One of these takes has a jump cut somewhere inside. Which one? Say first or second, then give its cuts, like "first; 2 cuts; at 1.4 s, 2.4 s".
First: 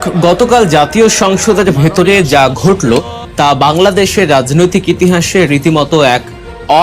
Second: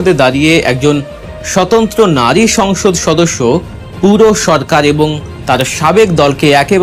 first; 1 cut; at 3.2 s